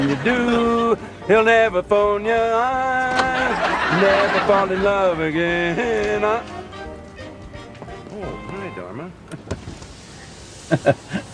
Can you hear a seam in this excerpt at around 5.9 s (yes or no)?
yes